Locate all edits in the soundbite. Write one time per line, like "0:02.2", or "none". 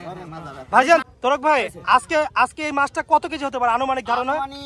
0:01.0